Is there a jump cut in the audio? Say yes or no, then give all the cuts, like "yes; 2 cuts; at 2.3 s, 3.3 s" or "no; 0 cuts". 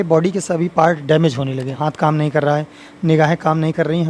yes; 1 cut; at 1.8 s